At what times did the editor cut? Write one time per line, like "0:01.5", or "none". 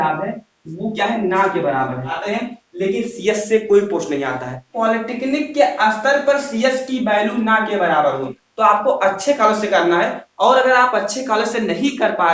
0:02.2
0:04.7
0:08.4